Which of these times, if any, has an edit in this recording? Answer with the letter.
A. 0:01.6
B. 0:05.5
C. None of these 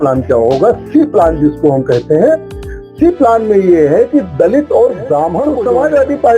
B